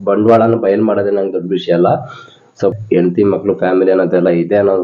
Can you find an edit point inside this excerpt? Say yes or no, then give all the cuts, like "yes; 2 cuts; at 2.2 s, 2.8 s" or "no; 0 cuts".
yes; 1 cut; at 2.6 s